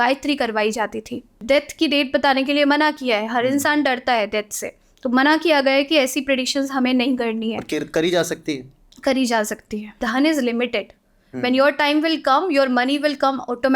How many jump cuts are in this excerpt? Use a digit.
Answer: 2